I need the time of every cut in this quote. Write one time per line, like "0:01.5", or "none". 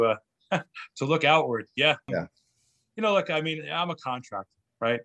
0:02.1